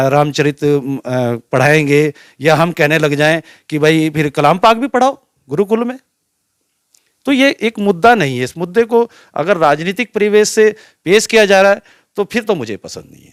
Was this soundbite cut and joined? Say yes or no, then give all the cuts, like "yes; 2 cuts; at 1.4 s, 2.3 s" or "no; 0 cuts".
no; 0 cuts